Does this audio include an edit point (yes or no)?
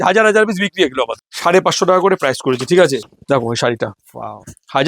yes